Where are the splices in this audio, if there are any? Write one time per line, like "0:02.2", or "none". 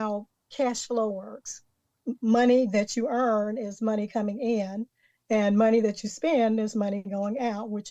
0:01.9

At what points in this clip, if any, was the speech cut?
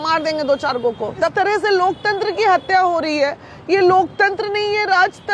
0:01.3

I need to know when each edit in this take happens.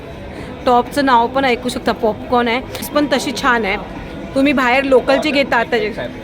0:02.9

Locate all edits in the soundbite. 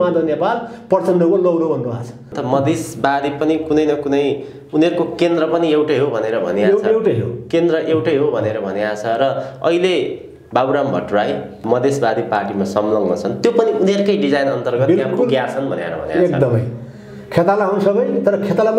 0:02.3
0:11.6

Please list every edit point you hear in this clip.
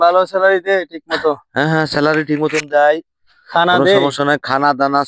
none

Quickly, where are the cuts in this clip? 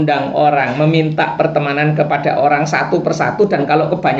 none

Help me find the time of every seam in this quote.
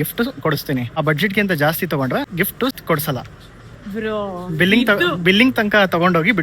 0:00.9
0:02.5

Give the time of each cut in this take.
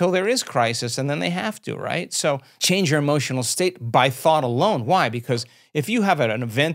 0:02.5

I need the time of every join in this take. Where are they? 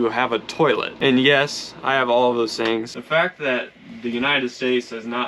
0:02.9

